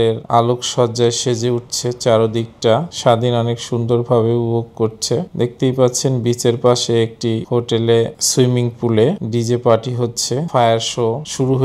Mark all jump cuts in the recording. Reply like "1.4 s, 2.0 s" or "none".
2.9 s, 10.5 s